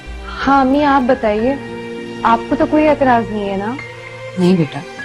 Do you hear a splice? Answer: no; 0 cuts

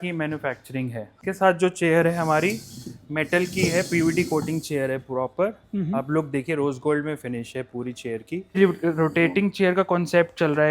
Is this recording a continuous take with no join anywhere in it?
no; 2 cuts; at 1.1 s, 8.6 s

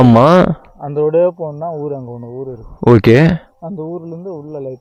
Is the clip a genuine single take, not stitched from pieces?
yes; 0 cuts

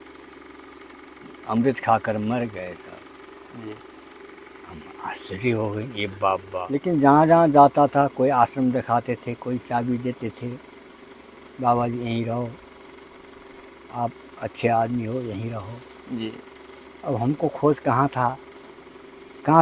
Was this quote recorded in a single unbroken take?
no; 1 cut; at 6.7 s

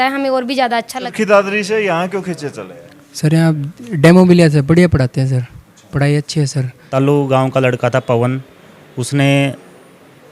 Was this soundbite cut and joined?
yes; 2 cuts; at 1.0 s, 6.8 s

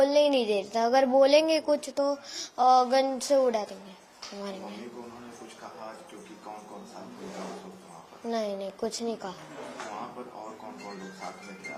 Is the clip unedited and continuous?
yes; 0 cuts

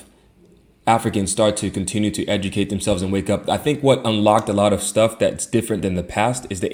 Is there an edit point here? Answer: no; 0 cuts

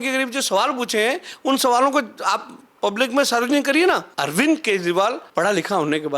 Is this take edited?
yes; 2 cuts; at 4.1 s, 5.2 s

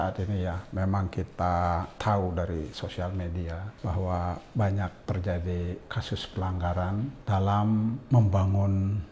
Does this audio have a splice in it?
yes; 4 cuts; at 2.0 s, 3.7 s, 5.0 s, 7.2 s

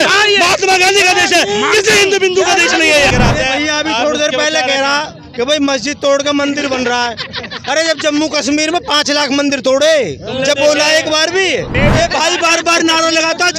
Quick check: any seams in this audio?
yes; 2 cuts; at 3.1 s, 11.7 s

